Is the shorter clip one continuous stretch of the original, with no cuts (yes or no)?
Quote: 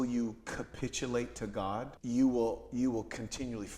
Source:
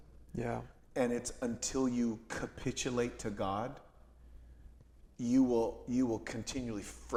no